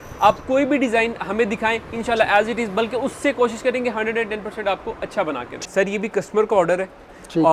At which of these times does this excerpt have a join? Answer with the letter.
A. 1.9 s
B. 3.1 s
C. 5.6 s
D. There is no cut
C